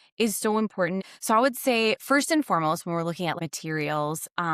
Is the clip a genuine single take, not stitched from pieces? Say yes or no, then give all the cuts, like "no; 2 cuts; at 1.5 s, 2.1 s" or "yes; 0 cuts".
no; 2 cuts; at 1.0 s, 3.4 s